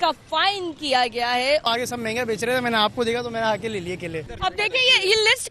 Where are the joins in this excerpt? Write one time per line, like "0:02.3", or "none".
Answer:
0:01.6
0:04.3